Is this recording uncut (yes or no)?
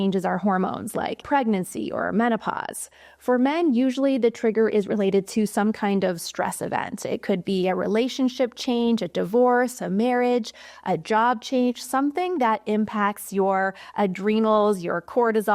no